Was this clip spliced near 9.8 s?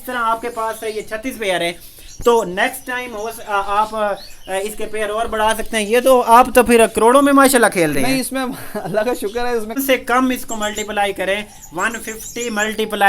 yes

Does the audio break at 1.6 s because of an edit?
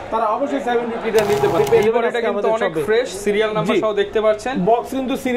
yes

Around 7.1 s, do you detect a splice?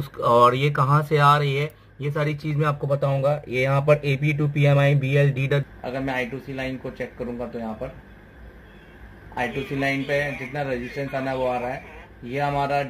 no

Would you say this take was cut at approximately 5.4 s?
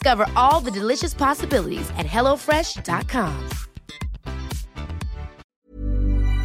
yes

